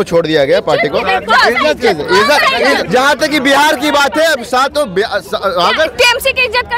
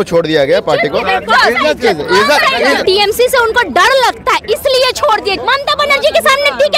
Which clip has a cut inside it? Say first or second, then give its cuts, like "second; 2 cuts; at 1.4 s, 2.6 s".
second; 2 cuts; at 2.8 s, 5.4 s